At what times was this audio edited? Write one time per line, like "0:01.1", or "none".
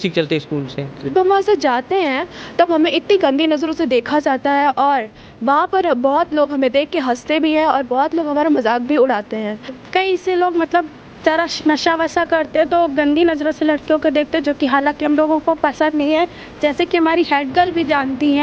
0:01.1
0:09.8